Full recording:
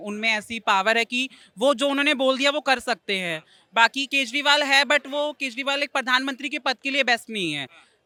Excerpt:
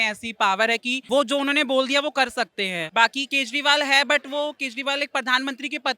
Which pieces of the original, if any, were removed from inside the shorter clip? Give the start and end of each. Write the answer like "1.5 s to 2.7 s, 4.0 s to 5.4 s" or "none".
1.2 s to 1.4 s, 3.3 s to 3.6 s

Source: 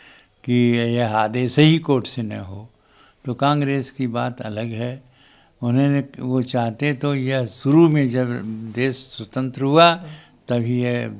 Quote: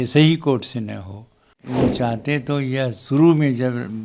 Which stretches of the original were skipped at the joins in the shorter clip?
3.0 s to 6.2 s

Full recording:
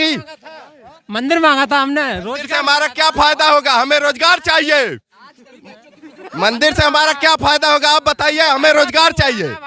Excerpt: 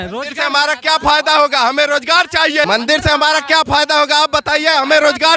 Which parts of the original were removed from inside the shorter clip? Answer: 4.8 s to 6.4 s

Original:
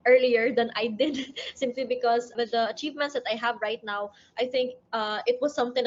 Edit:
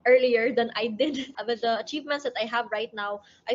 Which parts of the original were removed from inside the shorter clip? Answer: 1.4 s to 2.3 s

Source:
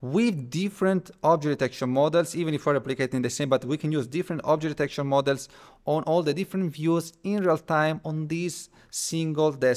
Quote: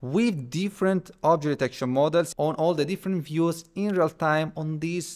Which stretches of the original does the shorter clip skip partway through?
2.3 s to 5.8 s

